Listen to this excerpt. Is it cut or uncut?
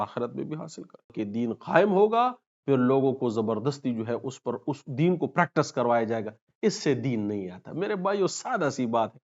cut